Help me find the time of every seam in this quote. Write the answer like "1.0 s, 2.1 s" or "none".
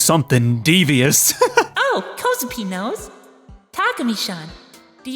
1.7 s